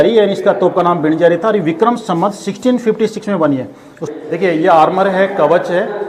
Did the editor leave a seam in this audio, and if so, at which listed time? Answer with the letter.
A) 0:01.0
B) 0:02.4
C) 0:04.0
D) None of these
C